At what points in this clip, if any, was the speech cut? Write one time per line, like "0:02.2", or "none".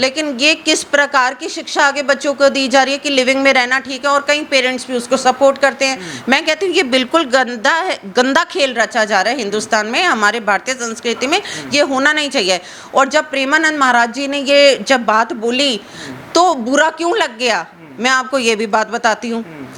none

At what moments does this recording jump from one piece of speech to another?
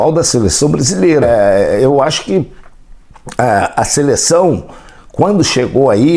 0:01.3

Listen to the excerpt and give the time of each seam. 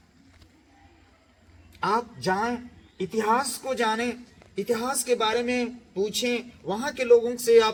none

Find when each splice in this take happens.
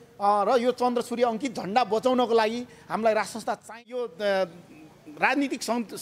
0:03.7

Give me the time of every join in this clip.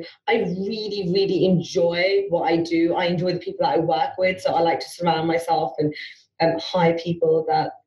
none

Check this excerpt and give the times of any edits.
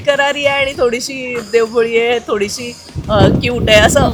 none

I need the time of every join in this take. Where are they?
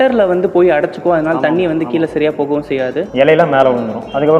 0:03.1

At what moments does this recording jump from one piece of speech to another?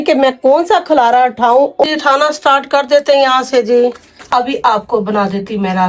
0:01.8
0:04.2

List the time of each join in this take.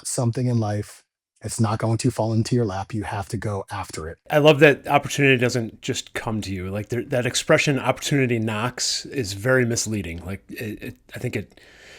0:04.3

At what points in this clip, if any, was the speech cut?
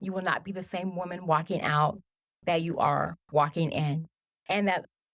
none

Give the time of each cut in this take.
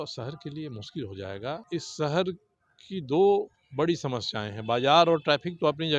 0:01.6

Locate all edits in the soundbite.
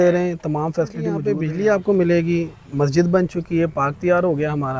0:01.4

